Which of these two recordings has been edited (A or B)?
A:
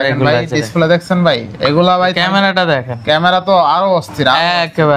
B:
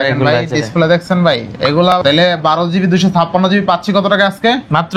B